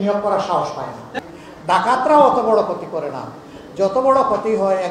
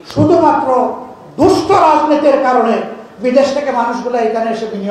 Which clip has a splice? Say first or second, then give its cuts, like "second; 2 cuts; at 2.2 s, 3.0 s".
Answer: first; 1 cut; at 1.0 s